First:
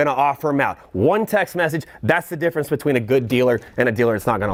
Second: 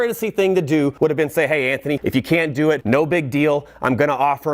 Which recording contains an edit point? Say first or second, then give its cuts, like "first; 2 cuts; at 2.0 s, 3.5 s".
second; 3 cuts; at 0.9 s, 2.0 s, 2.8 s